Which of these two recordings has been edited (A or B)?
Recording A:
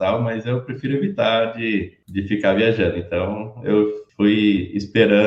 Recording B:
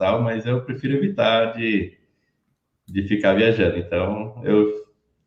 A